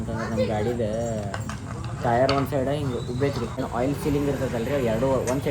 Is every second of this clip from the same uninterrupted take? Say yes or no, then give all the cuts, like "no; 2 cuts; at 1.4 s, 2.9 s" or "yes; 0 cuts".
no; 1 cut; at 3.6 s